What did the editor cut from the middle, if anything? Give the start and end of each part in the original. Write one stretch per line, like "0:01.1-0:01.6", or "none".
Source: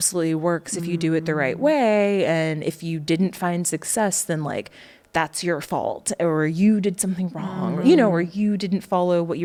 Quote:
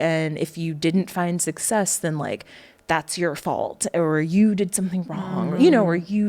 none